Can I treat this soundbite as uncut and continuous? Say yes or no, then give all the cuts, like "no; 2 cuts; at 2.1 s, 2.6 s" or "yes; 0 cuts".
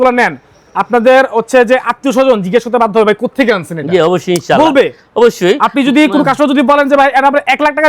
yes; 0 cuts